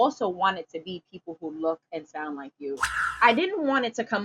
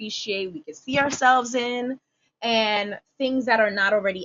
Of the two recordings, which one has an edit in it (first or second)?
first